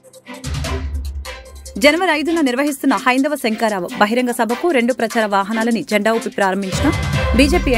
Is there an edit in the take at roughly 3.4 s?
no; 1 cut; at 1.6 s

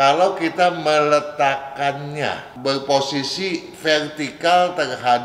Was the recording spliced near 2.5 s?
yes; 1 cut; at 2.5 s

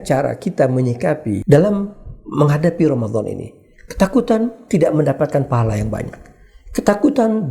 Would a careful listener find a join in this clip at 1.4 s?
yes; 1 cut; at 1.4 s

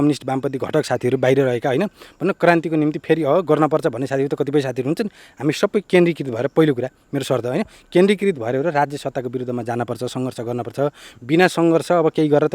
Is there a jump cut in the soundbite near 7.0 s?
no; 0 cuts

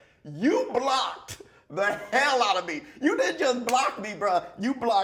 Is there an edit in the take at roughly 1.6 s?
no; 0 cuts

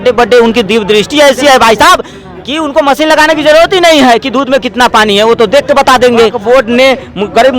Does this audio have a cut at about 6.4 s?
yes; 1 cut; at 6.4 s

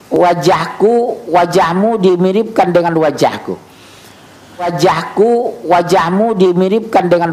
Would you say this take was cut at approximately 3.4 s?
no; 1 cut; at 4.6 s

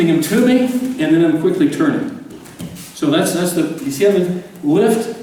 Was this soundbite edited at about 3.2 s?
no; 0 cuts

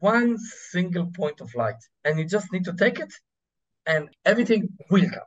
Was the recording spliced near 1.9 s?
yes; 2 cuts; at 1.9 s, 4.1 s

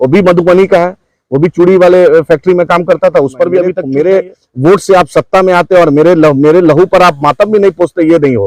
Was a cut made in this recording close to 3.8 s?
yes; 1 cut; at 3.8 s

